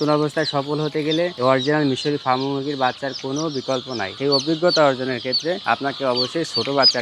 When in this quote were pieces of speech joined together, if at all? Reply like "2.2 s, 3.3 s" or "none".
1.3 s, 4.1 s, 5.6 s

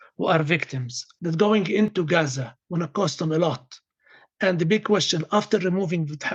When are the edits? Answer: 1.1 s

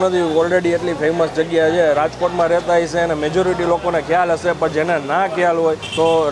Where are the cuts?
none

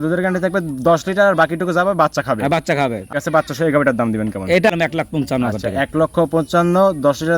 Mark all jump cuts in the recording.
3.1 s, 4.7 s

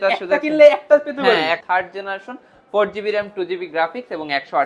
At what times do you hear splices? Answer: 1.6 s

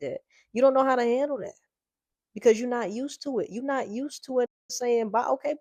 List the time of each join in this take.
none

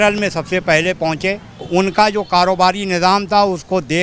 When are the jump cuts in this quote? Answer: 1.6 s

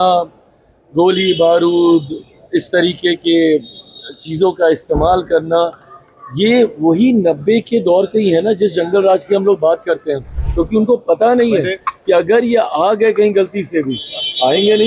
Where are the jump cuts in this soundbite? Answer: 10.4 s

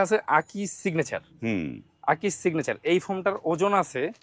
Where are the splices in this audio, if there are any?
none

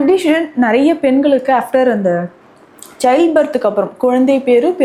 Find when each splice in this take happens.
none

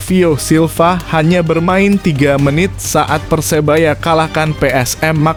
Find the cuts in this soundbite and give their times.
none

